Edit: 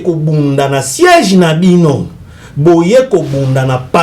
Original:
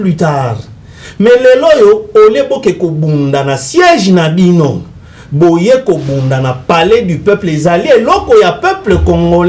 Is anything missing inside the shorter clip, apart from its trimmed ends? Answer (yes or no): no